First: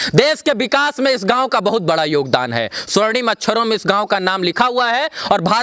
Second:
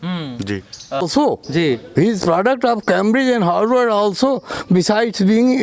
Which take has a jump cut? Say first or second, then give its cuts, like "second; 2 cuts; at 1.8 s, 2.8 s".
second; 1 cut; at 1.0 s